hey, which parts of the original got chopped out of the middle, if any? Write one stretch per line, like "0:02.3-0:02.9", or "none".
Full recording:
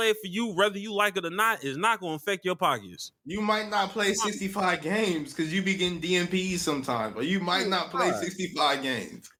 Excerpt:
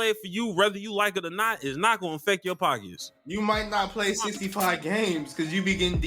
none